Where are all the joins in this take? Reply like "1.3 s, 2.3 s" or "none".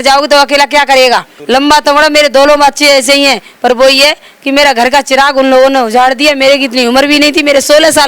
1.3 s